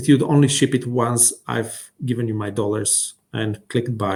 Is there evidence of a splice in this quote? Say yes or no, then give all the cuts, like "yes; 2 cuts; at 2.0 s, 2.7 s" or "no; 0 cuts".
no; 0 cuts